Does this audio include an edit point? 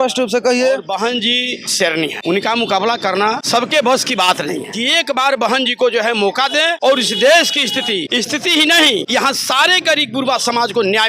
yes; 7 cuts; at 0.9 s, 2.2 s, 3.4 s, 4.7 s, 6.8 s, 8.1 s, 9.1 s

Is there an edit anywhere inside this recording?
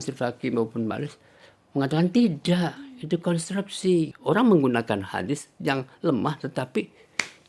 yes; 1 cut; at 4.1 s

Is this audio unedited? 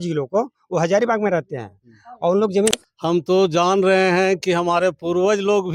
no; 1 cut; at 2.7 s

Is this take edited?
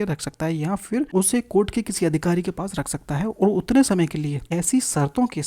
yes; 2 cuts; at 1.1 s, 4.4 s

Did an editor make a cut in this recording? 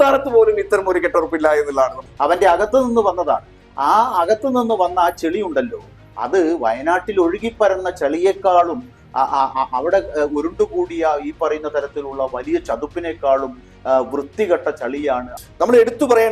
yes; 2 cuts; at 2.1 s, 15.4 s

